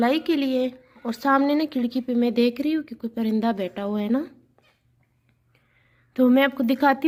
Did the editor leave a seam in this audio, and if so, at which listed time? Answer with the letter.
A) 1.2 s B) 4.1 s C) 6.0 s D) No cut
D